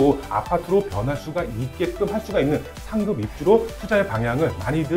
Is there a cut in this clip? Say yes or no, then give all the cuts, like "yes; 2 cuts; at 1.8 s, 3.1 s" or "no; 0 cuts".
no; 0 cuts